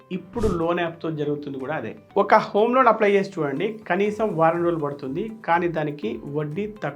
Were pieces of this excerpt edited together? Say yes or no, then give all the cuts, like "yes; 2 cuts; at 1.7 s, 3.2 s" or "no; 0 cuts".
no; 0 cuts